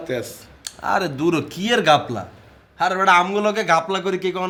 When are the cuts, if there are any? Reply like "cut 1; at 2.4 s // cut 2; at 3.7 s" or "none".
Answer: none